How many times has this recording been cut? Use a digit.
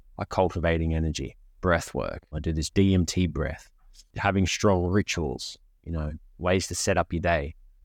2